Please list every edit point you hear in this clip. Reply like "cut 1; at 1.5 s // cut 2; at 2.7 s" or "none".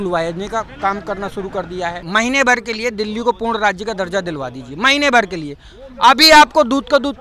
cut 1; at 2.0 s

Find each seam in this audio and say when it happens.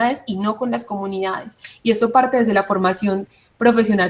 cut 1; at 1.1 s

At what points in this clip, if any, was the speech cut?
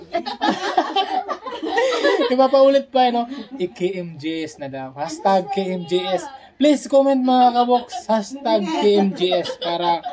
none

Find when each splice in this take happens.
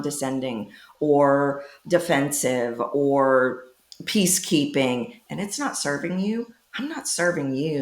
none

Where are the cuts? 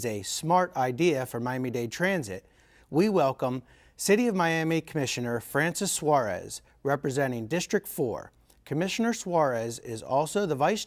none

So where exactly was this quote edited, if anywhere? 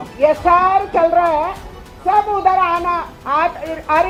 none

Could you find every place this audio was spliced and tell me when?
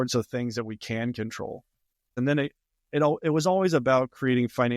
cut 1; at 2.1 s

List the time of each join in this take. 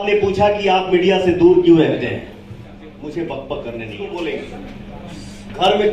cut 1; at 4.0 s

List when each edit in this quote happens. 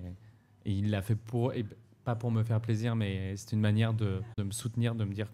cut 1; at 4.4 s

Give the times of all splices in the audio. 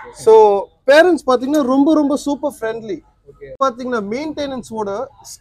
cut 1; at 3.5 s

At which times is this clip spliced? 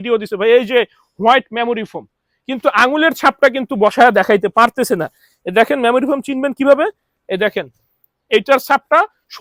none

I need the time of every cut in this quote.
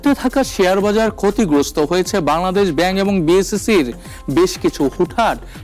none

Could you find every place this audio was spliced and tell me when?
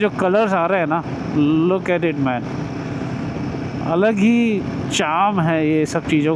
none

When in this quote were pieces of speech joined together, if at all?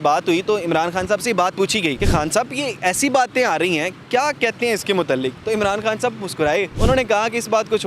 cut 1; at 2.0 s // cut 2; at 6.7 s

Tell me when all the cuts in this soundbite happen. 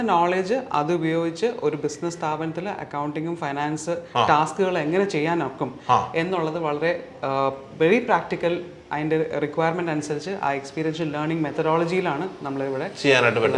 none

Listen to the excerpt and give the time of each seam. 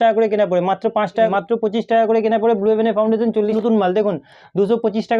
cut 1; at 1.3 s // cut 2; at 3.6 s

